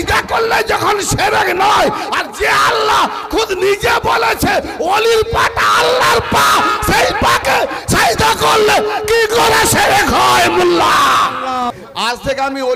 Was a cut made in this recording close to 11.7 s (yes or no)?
yes